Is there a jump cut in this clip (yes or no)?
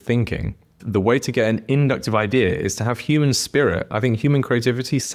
no